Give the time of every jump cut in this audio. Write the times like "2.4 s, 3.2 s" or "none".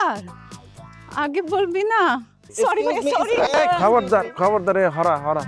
2.4 s